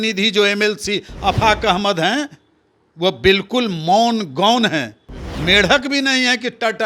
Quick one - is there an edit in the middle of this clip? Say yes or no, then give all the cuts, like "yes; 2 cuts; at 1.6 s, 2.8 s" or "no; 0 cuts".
no; 0 cuts